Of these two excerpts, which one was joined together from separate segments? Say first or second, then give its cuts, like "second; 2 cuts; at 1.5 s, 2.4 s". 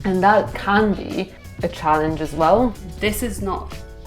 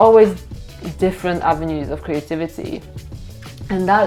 first; 2 cuts; at 1.4 s, 2.9 s